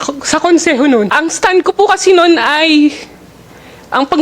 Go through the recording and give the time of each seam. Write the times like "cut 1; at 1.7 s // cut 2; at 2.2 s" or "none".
cut 1; at 1.1 s